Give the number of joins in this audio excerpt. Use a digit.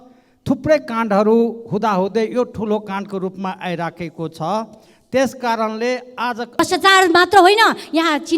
1